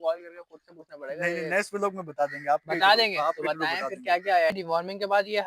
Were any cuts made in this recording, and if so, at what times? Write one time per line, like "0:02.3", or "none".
0:04.5